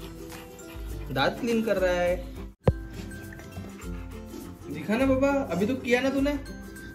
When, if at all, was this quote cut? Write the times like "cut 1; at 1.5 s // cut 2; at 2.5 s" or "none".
cut 1; at 2.4 s